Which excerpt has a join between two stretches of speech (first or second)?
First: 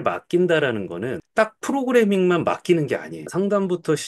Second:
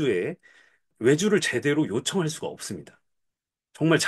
first